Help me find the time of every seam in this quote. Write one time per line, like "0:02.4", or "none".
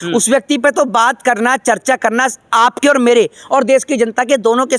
none